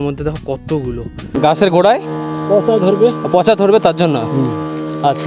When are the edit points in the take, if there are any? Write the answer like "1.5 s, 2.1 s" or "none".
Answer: 1.3 s